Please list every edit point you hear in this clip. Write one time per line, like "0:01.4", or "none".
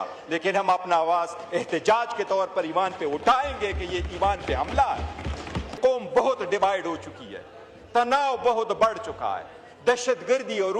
0:05.8